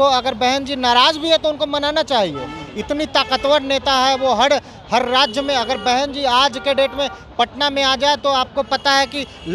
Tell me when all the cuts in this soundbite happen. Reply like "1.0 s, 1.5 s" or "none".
none